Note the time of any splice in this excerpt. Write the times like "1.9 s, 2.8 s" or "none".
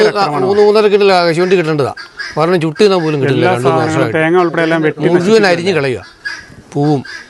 none